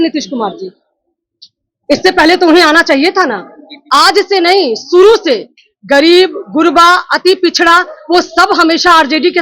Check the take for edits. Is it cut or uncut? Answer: cut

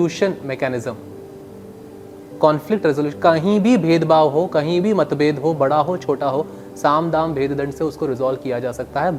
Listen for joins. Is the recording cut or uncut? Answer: uncut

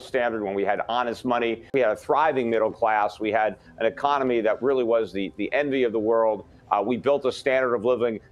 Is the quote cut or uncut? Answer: cut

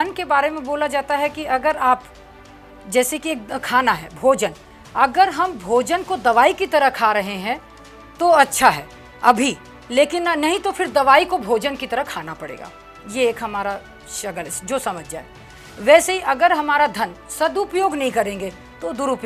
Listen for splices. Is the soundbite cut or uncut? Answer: uncut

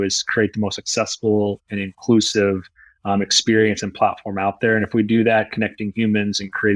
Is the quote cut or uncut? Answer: uncut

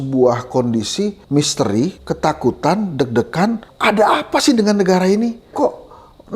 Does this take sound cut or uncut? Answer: cut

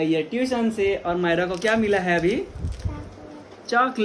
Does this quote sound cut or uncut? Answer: uncut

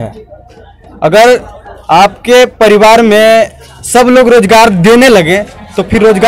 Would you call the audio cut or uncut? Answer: uncut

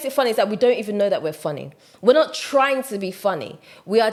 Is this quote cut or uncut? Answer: uncut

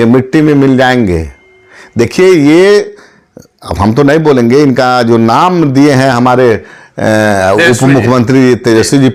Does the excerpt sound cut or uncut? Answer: uncut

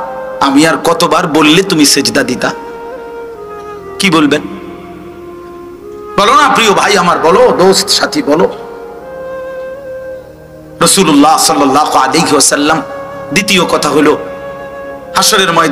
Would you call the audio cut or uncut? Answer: cut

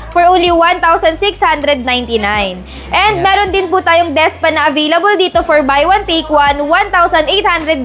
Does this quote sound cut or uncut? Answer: uncut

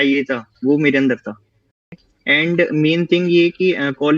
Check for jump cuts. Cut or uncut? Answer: cut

